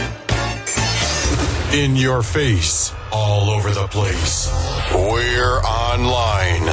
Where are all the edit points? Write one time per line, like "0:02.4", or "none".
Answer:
0:01.2